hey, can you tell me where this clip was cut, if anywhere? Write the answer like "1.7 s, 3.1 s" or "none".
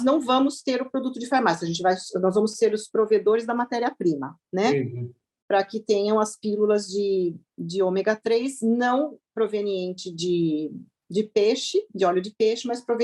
none